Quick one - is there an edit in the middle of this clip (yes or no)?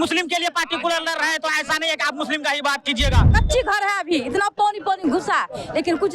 yes